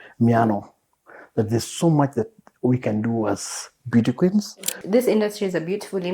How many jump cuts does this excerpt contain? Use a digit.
1